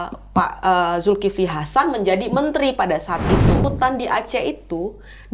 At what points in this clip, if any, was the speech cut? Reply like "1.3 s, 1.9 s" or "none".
3.6 s